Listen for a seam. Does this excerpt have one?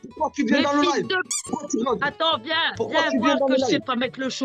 no; 0 cuts

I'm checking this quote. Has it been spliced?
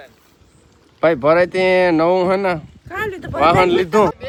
no; 0 cuts

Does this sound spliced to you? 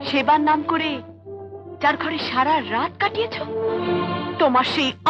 no; 0 cuts

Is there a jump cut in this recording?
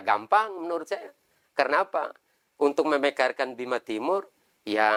no; 0 cuts

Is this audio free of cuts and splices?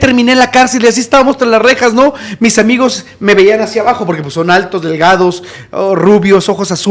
yes; 0 cuts

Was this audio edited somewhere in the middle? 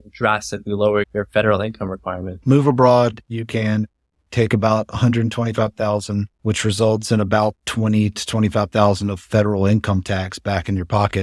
yes; 2 cuts; at 2.3 s, 6.3 s

